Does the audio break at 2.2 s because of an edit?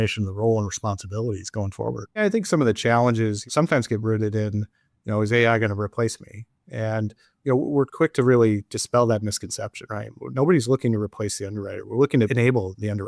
yes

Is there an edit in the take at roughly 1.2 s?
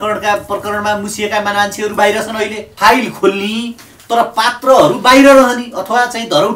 no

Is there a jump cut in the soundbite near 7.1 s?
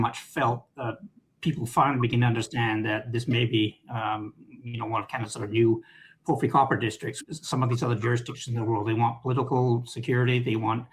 yes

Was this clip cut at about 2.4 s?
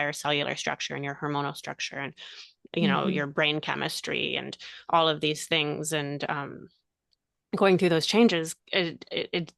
no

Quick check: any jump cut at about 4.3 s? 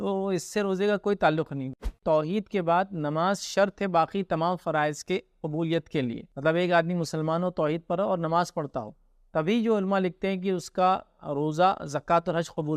no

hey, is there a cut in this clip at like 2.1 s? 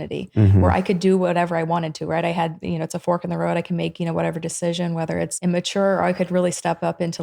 no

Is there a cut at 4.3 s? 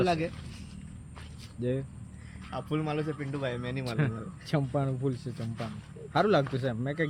no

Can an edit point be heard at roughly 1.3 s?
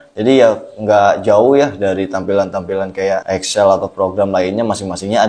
no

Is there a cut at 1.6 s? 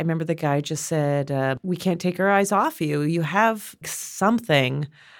yes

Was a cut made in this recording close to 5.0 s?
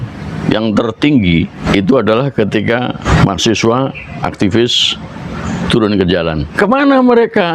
no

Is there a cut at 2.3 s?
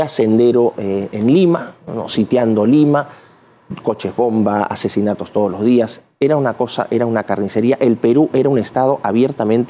no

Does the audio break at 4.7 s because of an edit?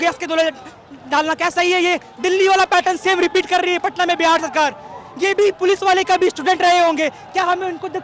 no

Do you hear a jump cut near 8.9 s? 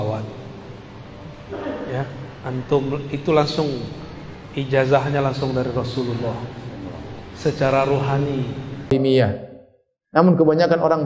yes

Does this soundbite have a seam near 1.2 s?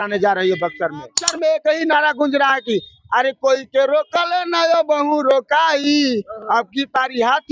yes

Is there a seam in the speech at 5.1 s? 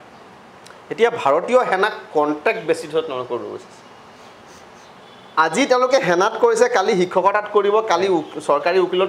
no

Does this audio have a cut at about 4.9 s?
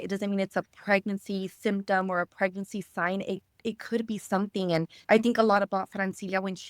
yes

